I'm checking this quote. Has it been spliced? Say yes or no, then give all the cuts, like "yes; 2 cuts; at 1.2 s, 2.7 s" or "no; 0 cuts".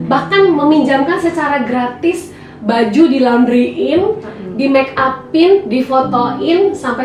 no; 0 cuts